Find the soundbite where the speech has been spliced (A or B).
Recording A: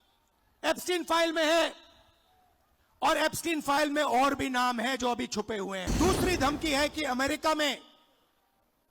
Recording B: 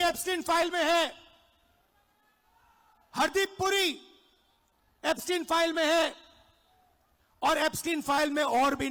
A